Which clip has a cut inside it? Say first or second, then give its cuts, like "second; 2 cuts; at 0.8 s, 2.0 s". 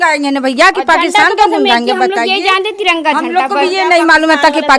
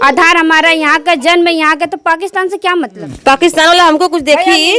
second; 1 cut; at 3.1 s